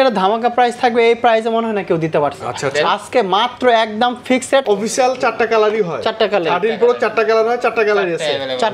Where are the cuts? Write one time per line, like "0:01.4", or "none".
0:04.6

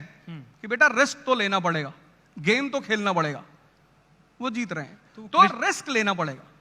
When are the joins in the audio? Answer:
none

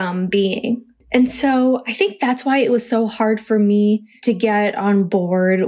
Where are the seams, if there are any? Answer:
0:00.9
0:04.1

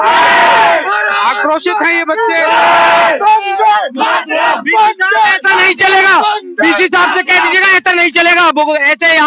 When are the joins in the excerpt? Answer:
none

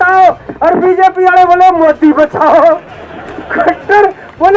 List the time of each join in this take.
none

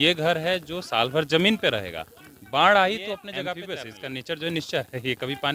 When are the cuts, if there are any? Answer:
0:03.6

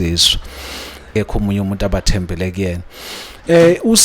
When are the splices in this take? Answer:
0:01.1

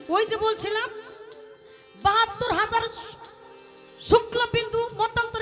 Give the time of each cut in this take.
none

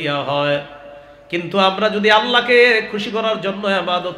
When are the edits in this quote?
none

